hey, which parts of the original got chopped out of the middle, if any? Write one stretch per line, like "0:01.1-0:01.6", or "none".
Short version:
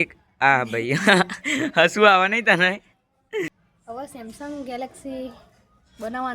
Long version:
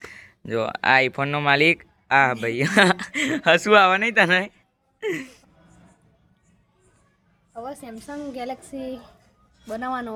0:05.2-0:07.2